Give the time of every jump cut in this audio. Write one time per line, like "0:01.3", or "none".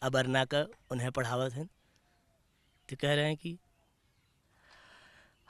none